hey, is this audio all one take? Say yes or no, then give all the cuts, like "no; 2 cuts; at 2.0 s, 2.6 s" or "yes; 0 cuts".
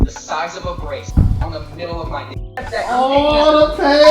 no; 2 cuts; at 1.1 s, 2.7 s